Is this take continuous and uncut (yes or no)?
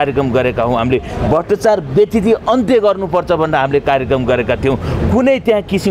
yes